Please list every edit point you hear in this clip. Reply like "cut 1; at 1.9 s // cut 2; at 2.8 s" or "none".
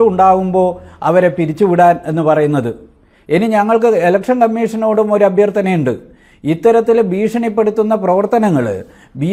none